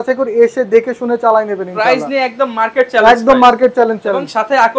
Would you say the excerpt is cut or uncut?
uncut